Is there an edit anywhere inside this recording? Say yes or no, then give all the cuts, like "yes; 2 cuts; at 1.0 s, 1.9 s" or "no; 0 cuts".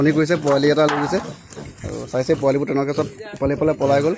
no; 0 cuts